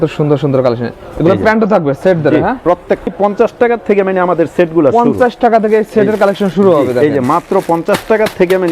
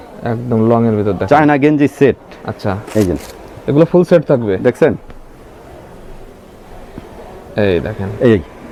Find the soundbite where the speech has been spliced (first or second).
first